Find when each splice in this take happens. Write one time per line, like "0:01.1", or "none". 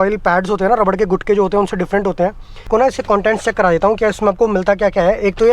0:02.7